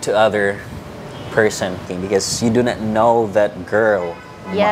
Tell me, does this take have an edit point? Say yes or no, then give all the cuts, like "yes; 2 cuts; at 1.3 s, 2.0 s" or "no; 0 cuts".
yes; 1 cut; at 1.9 s